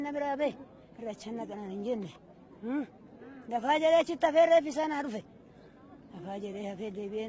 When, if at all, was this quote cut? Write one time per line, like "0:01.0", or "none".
0:01.0